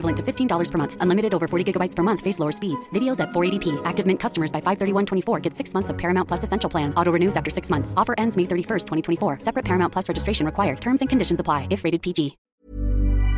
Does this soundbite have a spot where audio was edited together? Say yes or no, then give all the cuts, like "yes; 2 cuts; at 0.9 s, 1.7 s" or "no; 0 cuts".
yes; 1 cut; at 12.5 s